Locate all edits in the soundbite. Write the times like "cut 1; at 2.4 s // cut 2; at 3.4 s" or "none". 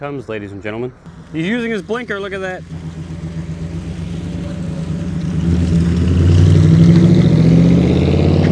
cut 1; at 1.1 s

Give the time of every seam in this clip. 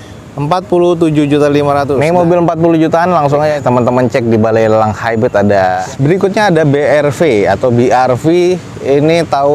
cut 1; at 2.0 s // cut 2; at 5.8 s

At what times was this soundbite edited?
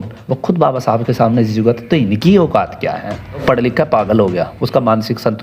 cut 1; at 3.4 s

